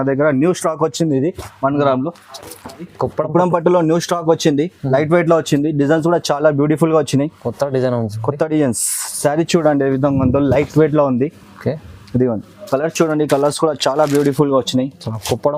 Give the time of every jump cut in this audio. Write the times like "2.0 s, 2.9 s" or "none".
2.9 s, 12.7 s